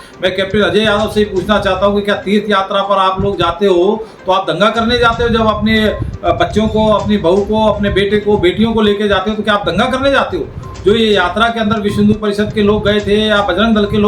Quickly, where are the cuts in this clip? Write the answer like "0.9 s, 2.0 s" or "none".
none

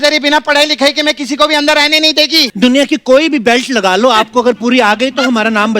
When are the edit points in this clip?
2.5 s

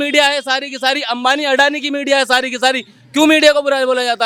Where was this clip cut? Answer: none

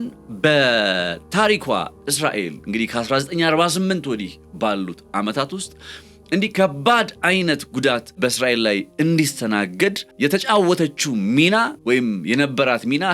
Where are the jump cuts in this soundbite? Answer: 8.2 s, 10.1 s, 11.8 s

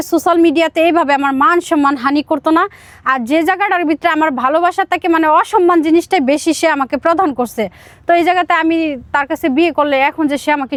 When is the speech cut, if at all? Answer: none

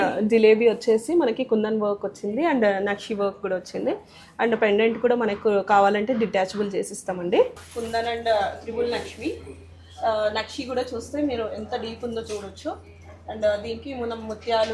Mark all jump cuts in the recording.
7.6 s

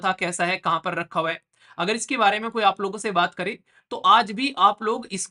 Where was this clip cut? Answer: none

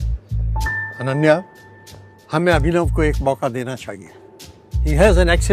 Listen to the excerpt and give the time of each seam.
none

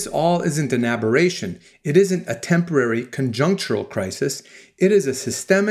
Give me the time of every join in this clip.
none

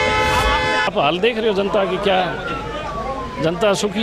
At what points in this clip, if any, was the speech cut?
0.9 s

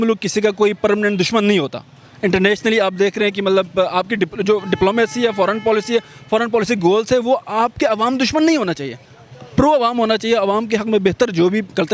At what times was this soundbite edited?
none

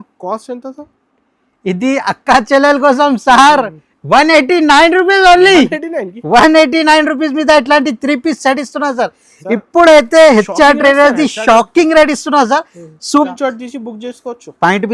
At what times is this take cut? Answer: 13.3 s

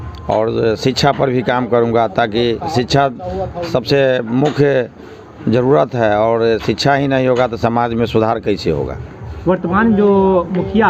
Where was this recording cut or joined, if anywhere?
none

